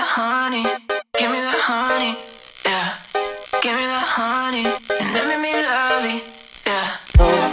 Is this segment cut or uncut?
uncut